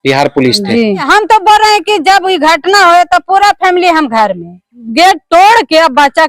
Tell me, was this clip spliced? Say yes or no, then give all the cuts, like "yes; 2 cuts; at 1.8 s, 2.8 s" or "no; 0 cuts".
yes; 2 cuts; at 1.1 s, 4.8 s